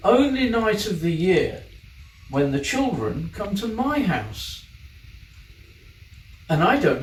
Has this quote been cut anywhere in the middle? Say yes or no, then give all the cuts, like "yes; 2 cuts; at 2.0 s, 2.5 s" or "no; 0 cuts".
no; 0 cuts